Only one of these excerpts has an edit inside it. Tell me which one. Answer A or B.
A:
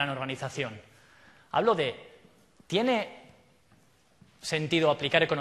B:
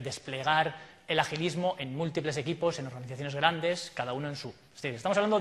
A